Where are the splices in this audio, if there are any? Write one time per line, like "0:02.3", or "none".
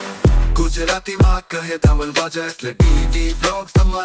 none